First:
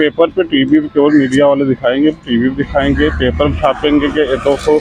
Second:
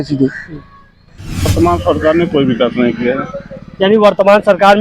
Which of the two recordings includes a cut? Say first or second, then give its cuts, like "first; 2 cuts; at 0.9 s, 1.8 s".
second; 1 cut; at 1.5 s